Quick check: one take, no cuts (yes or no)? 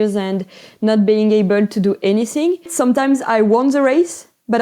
no